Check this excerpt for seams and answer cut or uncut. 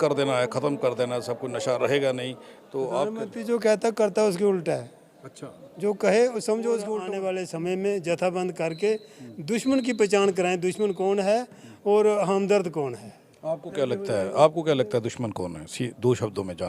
cut